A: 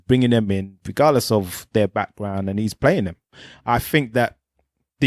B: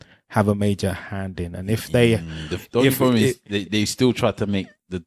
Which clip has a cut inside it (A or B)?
A